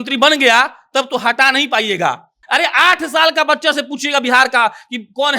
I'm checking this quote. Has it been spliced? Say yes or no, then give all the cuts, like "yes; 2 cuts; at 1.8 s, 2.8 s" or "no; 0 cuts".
yes; 1 cut; at 2.4 s